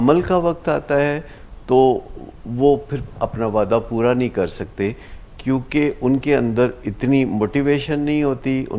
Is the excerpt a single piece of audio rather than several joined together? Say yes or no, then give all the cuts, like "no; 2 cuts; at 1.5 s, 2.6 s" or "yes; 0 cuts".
yes; 0 cuts